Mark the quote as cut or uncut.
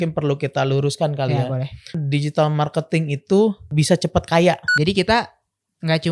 cut